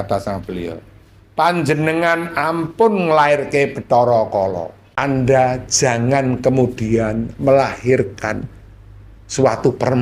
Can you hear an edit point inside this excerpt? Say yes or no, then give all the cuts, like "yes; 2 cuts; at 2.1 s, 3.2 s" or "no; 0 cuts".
no; 0 cuts